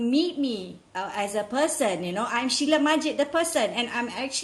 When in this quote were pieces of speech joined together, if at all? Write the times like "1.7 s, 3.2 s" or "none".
none